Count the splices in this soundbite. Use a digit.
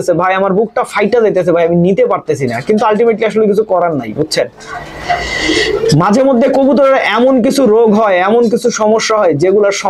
0